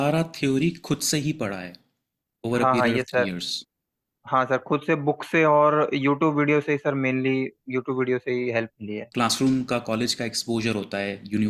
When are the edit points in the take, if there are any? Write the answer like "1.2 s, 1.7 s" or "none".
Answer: 9.1 s